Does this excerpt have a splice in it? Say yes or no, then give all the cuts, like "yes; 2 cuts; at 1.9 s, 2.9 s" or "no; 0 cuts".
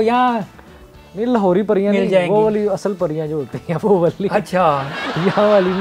no; 0 cuts